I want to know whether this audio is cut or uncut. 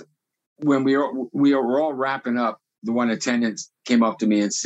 cut